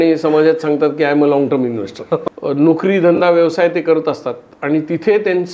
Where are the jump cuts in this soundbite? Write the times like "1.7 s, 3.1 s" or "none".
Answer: 2.2 s